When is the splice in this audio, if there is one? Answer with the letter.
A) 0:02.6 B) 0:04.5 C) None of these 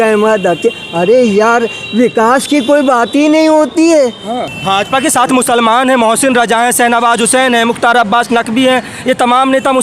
B